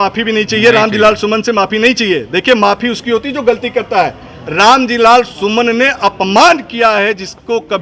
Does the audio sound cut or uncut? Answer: uncut